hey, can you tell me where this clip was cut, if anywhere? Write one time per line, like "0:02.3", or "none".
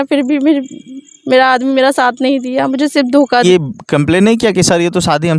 0:03.4